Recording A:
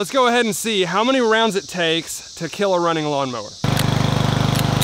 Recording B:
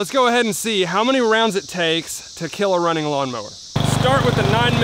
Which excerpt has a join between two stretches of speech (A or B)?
A